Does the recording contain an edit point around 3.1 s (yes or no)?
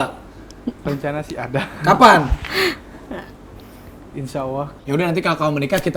no